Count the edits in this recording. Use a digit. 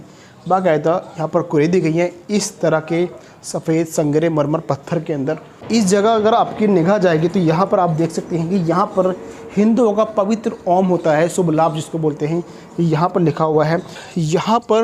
2